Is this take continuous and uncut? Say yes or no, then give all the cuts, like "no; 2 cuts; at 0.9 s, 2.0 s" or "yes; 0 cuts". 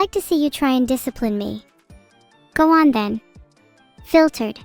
yes; 0 cuts